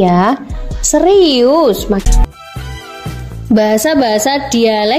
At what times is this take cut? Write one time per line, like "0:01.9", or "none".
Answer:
0:02.0